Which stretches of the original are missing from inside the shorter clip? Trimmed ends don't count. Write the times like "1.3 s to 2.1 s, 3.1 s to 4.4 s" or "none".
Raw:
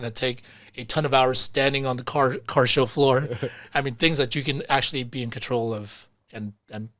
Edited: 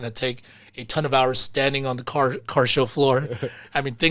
none